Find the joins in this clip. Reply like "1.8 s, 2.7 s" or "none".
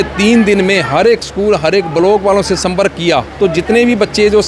3.3 s